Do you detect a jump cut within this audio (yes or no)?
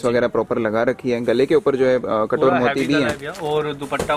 no